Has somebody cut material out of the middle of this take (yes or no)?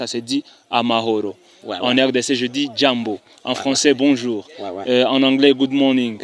no